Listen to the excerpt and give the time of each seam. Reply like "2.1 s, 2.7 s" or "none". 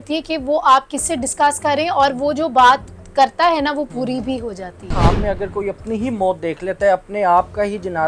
4.9 s